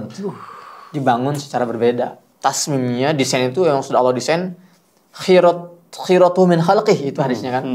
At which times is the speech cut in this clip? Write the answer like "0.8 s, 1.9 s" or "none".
2.2 s